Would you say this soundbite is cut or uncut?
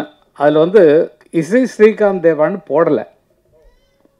uncut